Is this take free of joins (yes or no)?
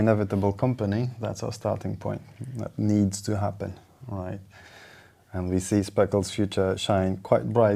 yes